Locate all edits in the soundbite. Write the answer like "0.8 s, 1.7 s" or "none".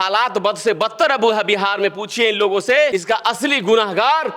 2.9 s